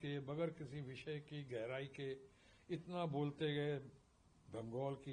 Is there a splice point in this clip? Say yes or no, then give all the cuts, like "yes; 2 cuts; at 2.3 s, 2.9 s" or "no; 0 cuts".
no; 0 cuts